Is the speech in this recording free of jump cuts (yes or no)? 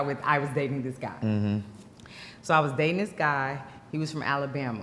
yes